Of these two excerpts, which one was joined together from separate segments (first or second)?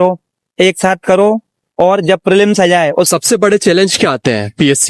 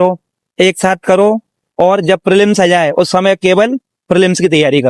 first